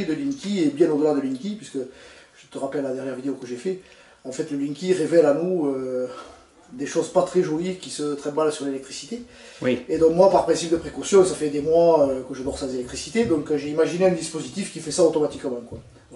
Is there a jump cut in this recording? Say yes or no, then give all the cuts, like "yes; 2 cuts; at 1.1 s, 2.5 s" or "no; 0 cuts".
yes; 1 cut; at 3.0 s